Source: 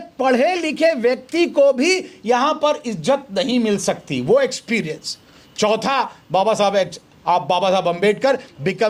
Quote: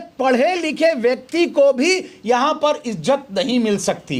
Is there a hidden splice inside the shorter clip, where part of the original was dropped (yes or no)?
no